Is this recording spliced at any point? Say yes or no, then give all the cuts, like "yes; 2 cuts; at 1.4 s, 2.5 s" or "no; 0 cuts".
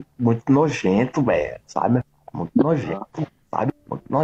no; 0 cuts